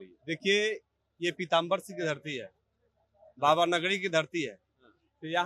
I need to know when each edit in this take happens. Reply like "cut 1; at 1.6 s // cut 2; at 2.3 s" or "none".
none